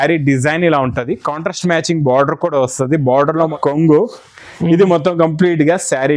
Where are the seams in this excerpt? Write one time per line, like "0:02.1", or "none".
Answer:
0:03.5